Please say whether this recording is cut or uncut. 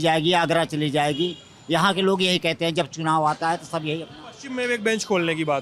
uncut